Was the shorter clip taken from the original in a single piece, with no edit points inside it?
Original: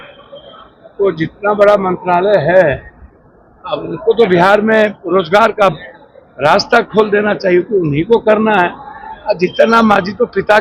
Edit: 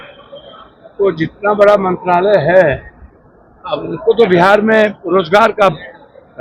yes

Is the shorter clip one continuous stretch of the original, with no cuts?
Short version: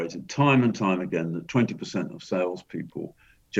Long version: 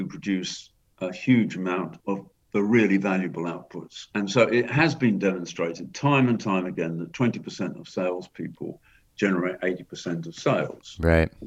yes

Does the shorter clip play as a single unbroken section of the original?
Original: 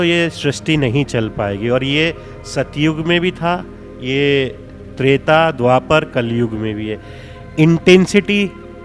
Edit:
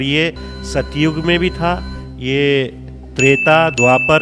yes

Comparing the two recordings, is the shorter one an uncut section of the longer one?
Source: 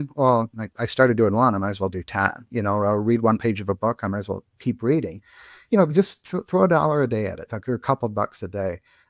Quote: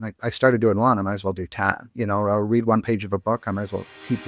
yes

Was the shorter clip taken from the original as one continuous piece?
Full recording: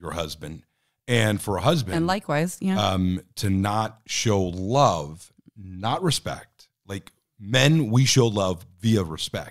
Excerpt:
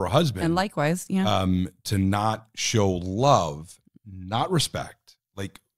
yes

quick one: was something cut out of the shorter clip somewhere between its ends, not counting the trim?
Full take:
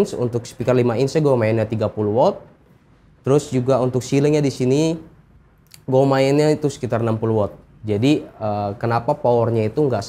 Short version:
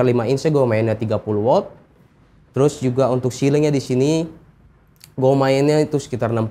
no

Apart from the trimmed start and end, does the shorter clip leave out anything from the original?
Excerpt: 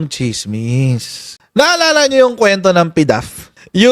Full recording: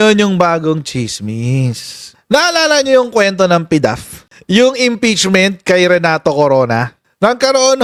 no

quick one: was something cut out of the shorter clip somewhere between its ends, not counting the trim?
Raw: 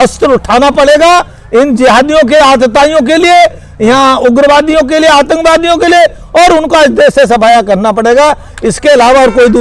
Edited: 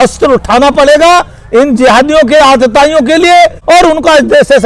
yes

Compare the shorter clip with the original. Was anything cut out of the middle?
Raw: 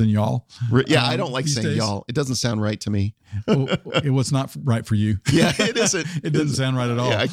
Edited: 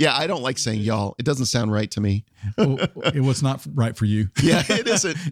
no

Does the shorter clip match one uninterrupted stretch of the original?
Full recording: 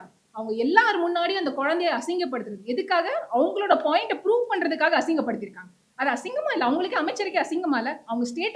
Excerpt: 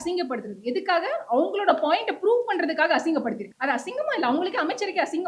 no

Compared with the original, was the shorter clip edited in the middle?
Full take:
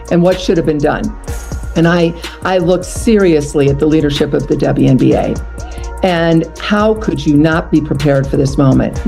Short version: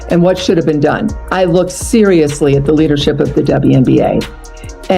yes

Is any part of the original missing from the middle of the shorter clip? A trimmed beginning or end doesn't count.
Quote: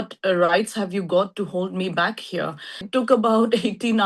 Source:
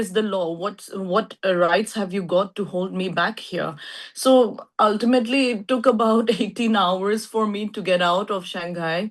yes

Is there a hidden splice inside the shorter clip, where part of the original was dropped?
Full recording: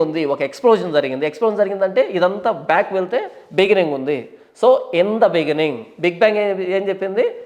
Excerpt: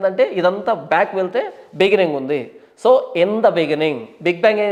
no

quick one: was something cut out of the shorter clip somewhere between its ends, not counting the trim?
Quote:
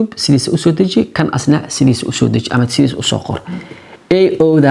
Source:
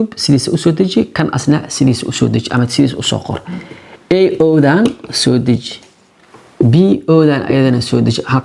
no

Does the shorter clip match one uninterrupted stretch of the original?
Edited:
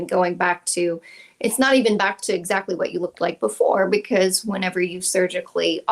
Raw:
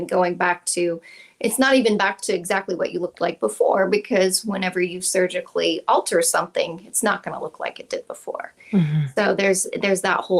yes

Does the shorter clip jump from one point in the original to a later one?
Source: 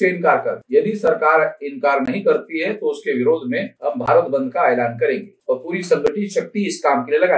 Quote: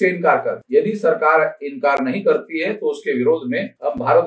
no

